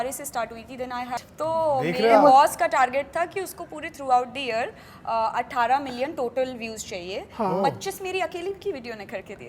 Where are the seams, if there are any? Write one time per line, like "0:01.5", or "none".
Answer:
0:01.2